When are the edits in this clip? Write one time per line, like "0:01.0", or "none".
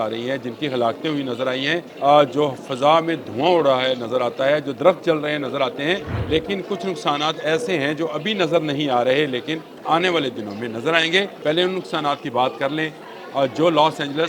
0:01.9
0:06.1
0:09.7
0:11.3